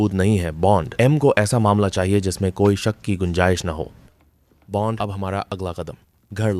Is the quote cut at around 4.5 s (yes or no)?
yes